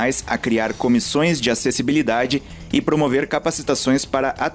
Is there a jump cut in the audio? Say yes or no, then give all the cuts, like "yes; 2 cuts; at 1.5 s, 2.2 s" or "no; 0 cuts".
no; 0 cuts